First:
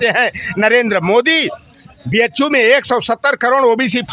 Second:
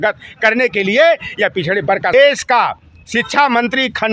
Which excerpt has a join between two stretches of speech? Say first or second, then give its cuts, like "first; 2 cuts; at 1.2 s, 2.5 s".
second; 1 cut; at 2.1 s